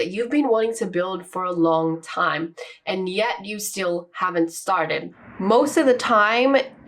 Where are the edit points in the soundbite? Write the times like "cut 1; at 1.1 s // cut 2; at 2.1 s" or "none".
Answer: cut 1; at 5.3 s